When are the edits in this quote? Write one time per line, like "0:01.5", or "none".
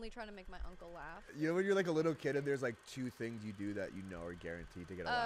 0:01.3